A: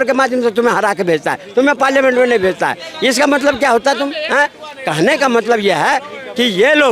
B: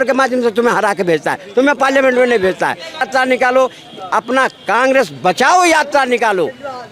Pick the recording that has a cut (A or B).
B